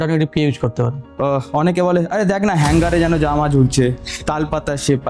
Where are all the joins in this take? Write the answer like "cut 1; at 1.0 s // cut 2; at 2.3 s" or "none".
cut 1; at 1.0 s